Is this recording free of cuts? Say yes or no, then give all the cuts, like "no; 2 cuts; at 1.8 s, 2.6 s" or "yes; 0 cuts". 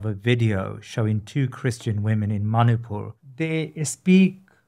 no; 1 cut; at 3.2 s